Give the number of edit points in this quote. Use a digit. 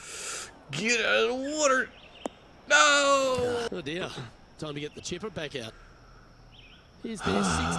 1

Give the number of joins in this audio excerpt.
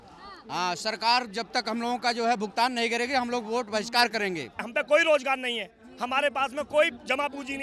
1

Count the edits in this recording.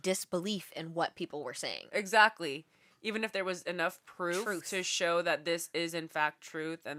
0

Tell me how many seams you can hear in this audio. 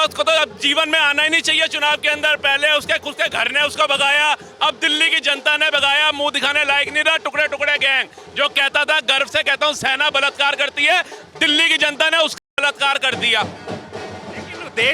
0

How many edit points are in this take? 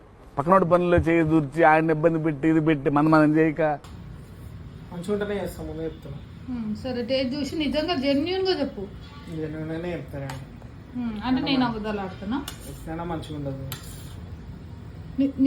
1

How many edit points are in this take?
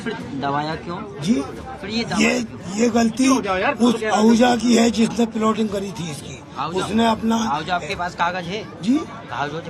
0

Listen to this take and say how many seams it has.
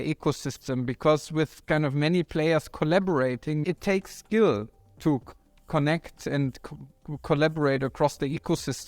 1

